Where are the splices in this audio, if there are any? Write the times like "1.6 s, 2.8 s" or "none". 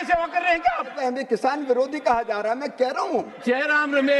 0.9 s, 3.3 s